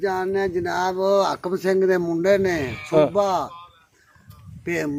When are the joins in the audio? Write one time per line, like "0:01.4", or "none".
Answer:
none